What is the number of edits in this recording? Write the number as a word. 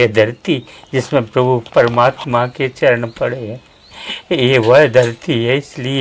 zero